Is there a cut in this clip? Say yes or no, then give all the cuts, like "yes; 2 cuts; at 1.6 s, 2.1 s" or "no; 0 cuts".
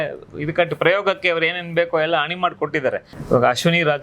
yes; 1 cut; at 3.1 s